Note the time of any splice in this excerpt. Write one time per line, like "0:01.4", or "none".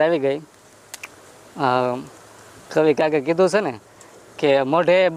none